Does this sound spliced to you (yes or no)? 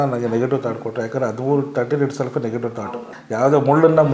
yes